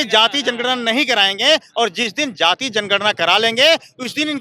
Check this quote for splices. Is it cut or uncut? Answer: uncut